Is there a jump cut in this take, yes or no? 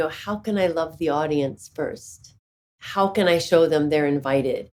no